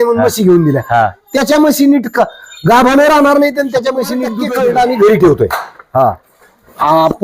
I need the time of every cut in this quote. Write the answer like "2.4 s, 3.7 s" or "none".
4.3 s